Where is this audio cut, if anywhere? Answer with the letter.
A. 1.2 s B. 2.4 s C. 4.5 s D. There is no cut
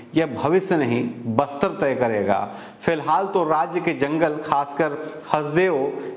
D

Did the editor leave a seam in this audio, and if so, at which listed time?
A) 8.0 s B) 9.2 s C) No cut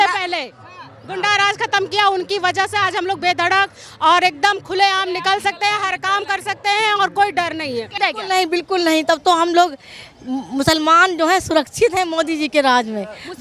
A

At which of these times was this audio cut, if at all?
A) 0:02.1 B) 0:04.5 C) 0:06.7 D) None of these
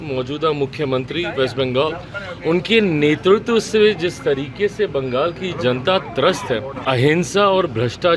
C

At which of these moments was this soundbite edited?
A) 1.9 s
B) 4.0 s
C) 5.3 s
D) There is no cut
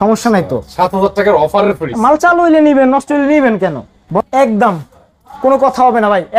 B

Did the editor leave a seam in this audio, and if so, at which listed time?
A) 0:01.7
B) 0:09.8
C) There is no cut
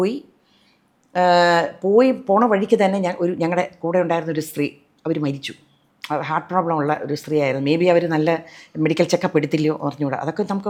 C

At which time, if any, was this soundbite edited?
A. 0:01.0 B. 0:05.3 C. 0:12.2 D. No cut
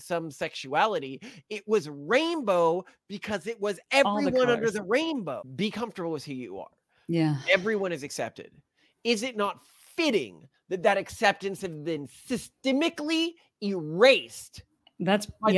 B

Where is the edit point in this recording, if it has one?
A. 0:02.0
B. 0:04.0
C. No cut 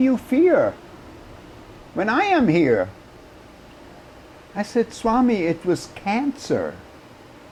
C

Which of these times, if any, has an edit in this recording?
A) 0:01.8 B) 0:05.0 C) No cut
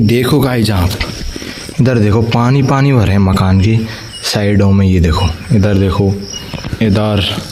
C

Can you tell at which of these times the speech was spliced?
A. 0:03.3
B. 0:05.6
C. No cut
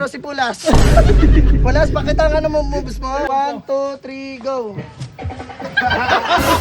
A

